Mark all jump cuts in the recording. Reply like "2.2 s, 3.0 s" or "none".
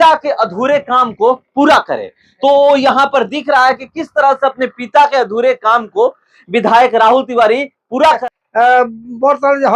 8.2 s